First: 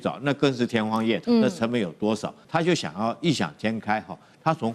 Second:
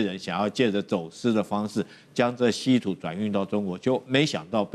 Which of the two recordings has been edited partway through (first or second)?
first